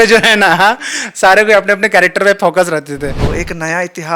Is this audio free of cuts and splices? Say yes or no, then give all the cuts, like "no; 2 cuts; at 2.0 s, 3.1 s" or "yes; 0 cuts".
no; 1 cut; at 3.2 s